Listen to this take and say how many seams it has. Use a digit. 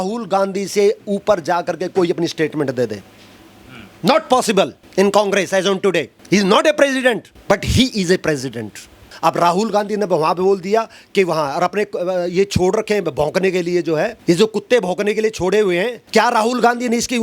6